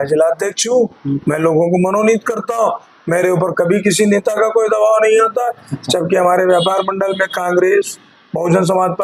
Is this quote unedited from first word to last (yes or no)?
yes